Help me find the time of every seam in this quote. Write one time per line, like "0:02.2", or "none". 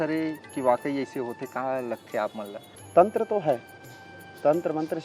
0:02.6